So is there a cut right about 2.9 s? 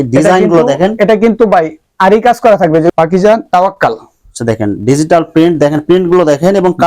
yes; 1 cut; at 2.9 s

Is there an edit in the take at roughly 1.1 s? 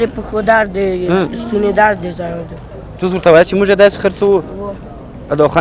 no; 1 cut; at 2.6 s

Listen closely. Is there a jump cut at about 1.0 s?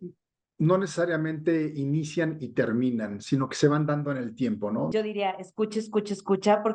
no; 1 cut; at 4.9 s

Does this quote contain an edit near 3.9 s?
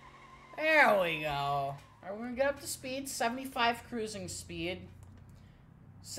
no; 1 cut; at 1.9 s

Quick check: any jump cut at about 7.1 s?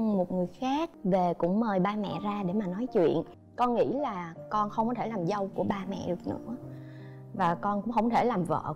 no; 2 cuts; at 0.9 s, 3.4 s

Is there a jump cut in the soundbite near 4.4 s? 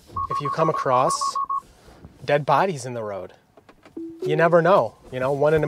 no; 0 cuts

